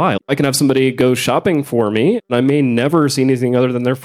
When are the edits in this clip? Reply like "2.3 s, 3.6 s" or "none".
none